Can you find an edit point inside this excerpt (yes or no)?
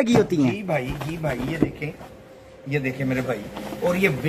no